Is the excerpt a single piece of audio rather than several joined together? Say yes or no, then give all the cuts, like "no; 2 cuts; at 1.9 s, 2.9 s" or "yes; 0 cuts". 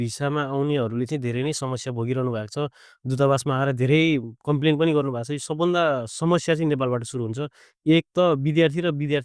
yes; 0 cuts